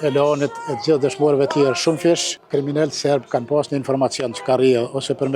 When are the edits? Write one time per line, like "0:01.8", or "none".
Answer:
0:02.3